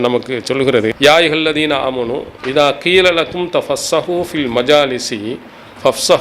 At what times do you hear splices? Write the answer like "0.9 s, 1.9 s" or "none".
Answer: 0.9 s, 2.3 s